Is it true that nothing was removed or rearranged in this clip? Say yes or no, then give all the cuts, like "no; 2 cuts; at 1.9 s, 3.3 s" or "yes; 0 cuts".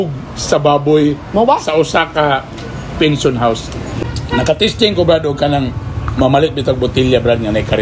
no; 1 cut; at 3.9 s